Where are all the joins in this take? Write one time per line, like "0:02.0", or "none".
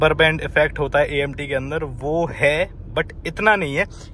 none

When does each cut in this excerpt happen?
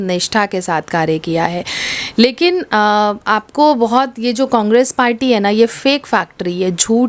none

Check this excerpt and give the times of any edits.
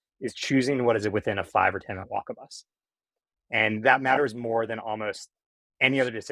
none

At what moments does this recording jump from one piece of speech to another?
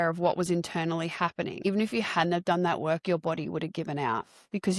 0:01.6

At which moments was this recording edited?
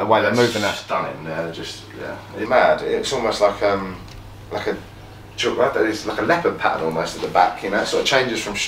0:02.4

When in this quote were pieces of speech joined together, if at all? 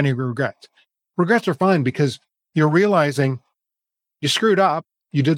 none

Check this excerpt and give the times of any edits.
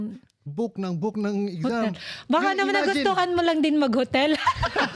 none

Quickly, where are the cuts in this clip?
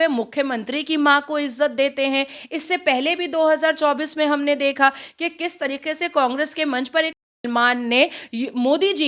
none

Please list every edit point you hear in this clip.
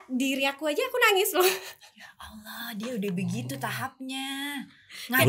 none

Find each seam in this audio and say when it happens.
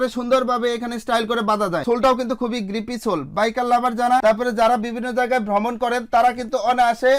none

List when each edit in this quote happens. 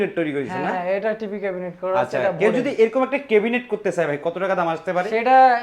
none

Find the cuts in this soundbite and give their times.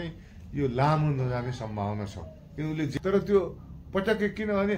0:02.9

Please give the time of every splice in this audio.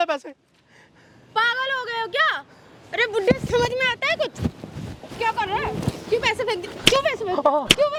none

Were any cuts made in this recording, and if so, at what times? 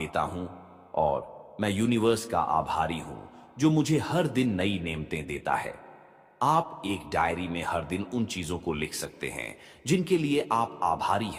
none

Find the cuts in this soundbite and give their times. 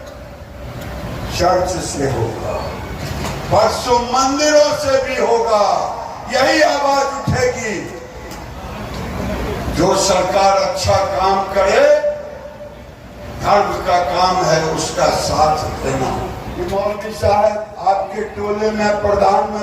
0:16.7

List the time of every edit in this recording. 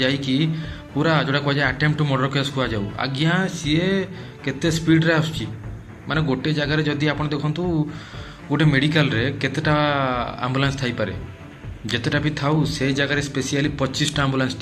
none

